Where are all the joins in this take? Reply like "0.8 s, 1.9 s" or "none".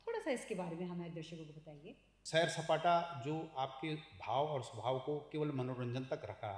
2.2 s